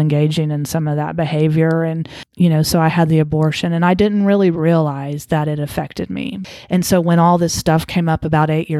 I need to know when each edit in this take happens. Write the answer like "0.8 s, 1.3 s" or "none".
2.2 s, 6.4 s